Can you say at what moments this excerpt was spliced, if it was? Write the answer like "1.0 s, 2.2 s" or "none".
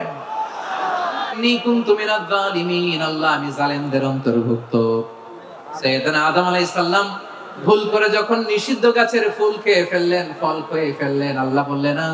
1.3 s